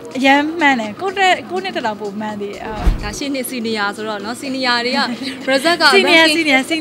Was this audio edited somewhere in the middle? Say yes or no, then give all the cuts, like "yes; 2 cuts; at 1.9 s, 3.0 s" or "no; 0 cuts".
yes; 1 cut; at 2.9 s